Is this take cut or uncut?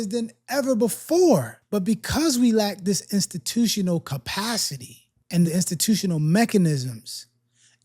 cut